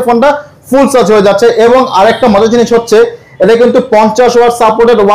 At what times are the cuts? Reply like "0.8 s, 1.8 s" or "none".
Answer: none

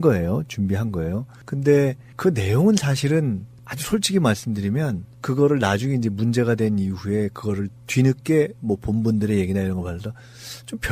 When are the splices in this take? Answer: none

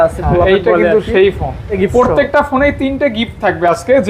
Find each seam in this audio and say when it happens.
1.7 s

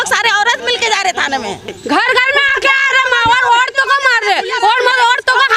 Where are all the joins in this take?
1.8 s

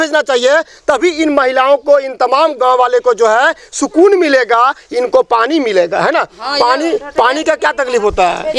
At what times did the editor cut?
none

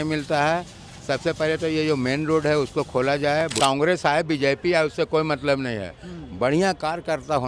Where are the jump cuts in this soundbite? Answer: 3.6 s

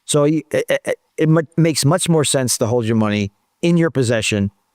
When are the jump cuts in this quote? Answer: 1.0 s

